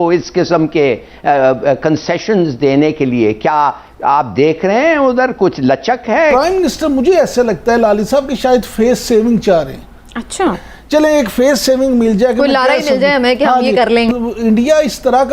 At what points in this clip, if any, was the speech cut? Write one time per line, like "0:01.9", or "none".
0:06.3
0:10.6
0:14.1

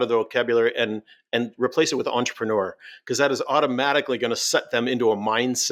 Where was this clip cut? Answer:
none

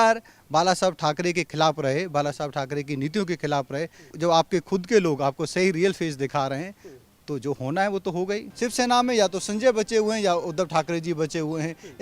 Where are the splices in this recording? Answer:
0:04.1
0:08.4

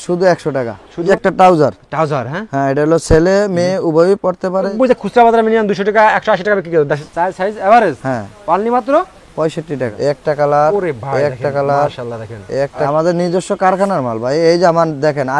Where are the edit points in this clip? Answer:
0:01.1
0:04.7
0:07.0
0:09.9
0:12.9

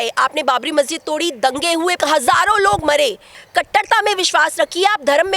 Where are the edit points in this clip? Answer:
0:02.0
0:03.3

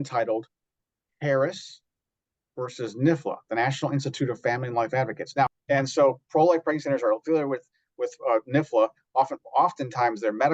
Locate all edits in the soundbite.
0:05.2

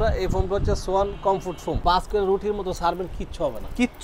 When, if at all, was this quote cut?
0:01.8

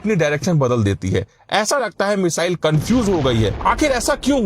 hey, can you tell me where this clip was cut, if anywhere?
0:03.6

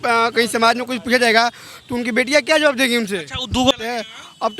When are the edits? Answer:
0:03.7

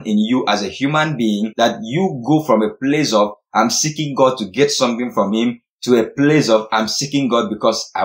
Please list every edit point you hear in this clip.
none

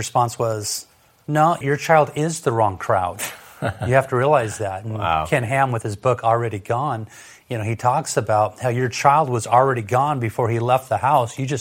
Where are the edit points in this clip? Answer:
0:01.6

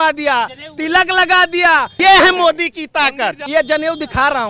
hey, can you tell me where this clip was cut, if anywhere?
0:01.9
0:03.4

